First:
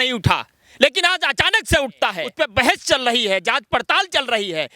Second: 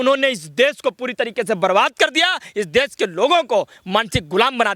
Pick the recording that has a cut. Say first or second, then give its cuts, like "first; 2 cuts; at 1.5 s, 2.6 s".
first; 1 cut; at 2.2 s